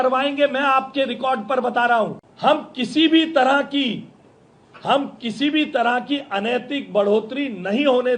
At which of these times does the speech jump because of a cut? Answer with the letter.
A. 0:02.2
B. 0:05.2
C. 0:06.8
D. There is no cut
A